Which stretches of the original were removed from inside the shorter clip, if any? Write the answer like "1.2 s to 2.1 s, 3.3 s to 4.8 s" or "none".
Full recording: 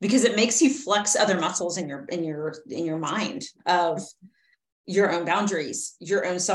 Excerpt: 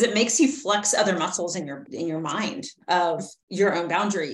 2.0 s to 2.6 s, 4.1 s to 4.7 s